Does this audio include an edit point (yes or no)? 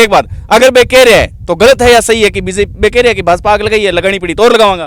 no